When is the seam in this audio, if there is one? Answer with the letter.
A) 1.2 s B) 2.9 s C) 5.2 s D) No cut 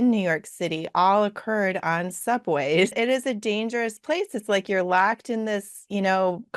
B